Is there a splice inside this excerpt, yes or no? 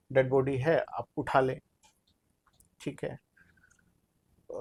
no